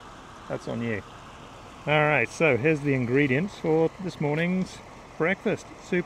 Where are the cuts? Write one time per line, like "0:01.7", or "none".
none